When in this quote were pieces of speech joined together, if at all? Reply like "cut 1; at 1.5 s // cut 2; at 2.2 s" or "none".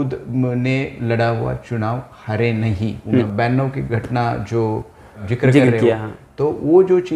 cut 1; at 3.0 s // cut 2; at 5.2 s